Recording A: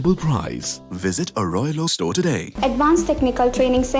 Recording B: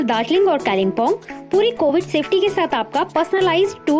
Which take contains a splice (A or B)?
A